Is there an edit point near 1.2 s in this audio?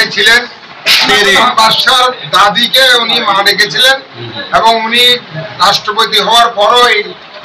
yes; 1 cut; at 1.2 s

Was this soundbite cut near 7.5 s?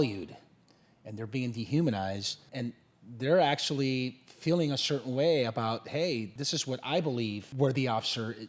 yes; 3 cuts; at 2.5 s, 6.3 s, 7.5 s

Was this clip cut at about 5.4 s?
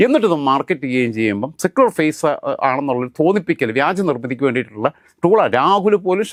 no; 0 cuts

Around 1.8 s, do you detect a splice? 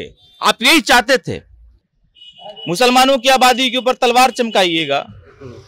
yes; 1 cut; at 1.8 s

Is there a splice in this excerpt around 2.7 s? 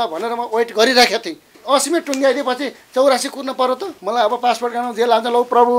no; 2 cuts; at 1.5 s, 3.9 s

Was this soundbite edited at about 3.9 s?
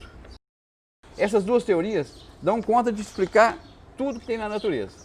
no; 1 cut; at 0.9 s

